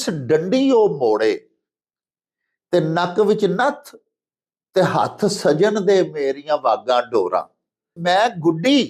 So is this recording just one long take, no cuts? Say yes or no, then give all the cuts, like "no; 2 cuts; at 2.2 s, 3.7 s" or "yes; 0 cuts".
no; 1 cut; at 8.0 s